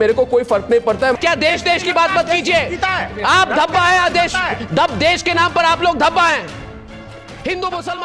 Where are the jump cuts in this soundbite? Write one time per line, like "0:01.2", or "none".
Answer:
0:01.1